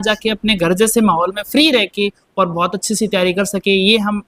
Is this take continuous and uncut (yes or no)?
yes